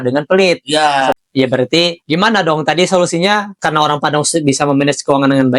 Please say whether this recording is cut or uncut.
cut